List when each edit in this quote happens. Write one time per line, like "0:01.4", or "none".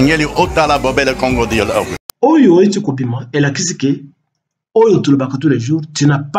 0:02.0